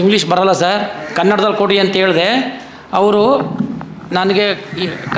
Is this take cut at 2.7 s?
no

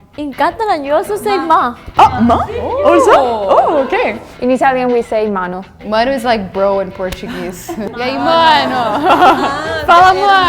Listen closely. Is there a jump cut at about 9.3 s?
no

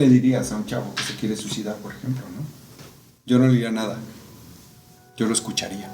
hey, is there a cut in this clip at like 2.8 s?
yes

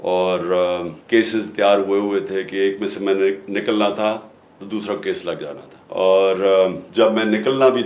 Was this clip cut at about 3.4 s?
no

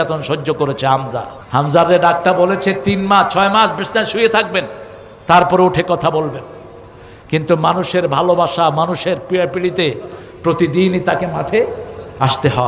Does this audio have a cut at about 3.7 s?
no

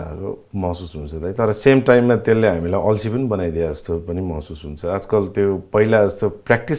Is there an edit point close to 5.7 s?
no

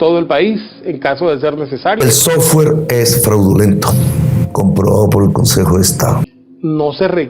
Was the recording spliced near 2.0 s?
yes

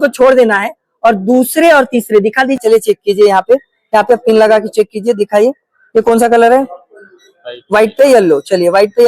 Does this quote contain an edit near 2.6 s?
yes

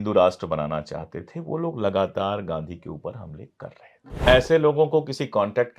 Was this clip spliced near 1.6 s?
no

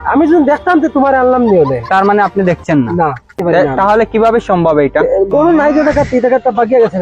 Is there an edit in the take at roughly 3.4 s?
yes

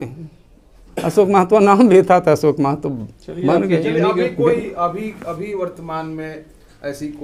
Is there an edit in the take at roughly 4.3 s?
no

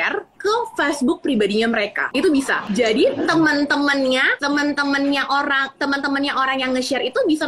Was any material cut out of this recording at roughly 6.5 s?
no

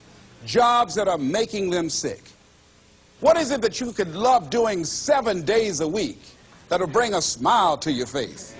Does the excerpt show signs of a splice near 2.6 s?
yes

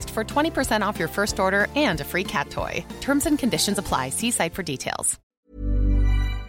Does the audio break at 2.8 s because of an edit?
no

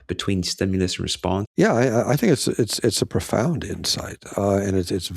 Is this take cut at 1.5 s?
yes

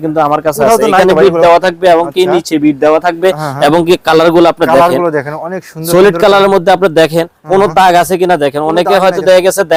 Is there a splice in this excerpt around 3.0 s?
no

